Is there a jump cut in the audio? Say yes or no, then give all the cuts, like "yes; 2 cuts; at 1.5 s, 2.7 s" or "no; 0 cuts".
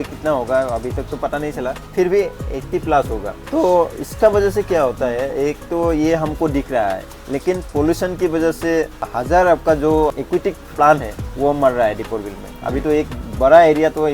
no; 0 cuts